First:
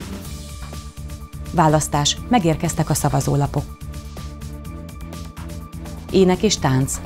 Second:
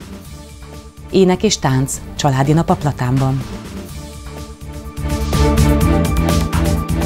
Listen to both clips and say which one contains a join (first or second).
first